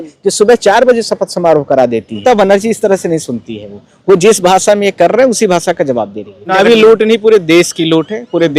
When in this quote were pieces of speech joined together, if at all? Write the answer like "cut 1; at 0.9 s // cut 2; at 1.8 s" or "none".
cut 1; at 2.2 s // cut 2; at 6.5 s

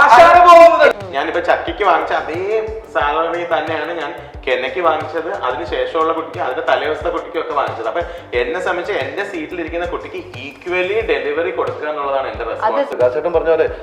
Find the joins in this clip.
cut 1; at 0.9 s // cut 2; at 12.9 s

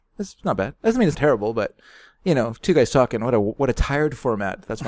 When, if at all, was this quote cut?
cut 1; at 1.1 s

